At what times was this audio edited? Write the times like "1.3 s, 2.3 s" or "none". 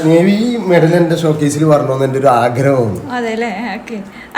none